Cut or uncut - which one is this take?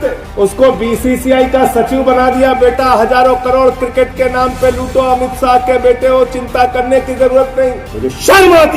cut